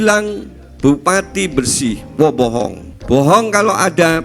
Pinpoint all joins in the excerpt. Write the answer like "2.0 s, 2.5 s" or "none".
2.9 s